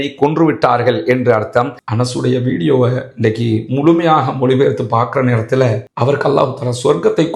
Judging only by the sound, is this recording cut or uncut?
cut